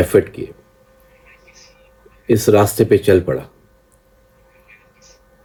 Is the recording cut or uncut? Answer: uncut